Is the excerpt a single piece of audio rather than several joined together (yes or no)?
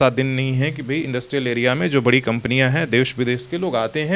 yes